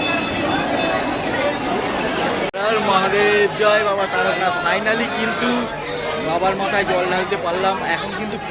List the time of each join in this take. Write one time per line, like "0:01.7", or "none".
none